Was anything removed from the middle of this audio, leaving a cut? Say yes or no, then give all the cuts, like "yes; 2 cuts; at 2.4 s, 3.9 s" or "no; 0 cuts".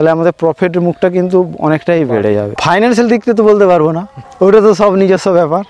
yes; 1 cut; at 2.5 s